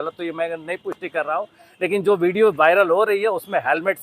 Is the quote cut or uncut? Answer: uncut